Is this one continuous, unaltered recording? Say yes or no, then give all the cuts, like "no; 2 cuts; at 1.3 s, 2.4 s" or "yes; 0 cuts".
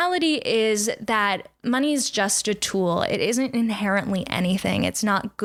yes; 0 cuts